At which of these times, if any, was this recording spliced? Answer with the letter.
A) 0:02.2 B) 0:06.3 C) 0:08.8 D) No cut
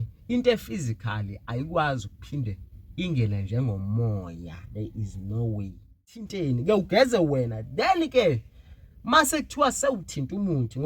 B